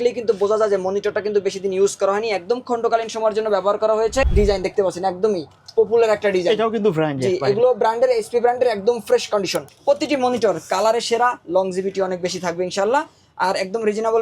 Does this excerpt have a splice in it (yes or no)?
yes